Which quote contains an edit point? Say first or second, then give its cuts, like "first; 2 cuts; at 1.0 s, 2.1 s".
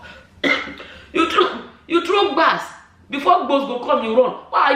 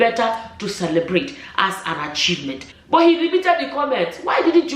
second; 1 cut; at 2.7 s